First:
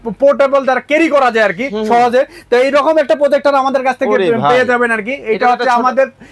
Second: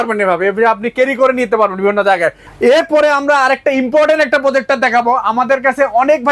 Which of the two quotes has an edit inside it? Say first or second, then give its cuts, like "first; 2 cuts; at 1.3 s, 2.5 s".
second; 1 cut; at 2.4 s